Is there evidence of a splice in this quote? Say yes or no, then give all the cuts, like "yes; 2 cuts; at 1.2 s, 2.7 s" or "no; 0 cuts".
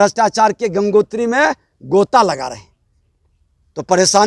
no; 0 cuts